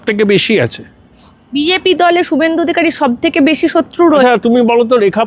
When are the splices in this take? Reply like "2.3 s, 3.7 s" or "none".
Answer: 4.2 s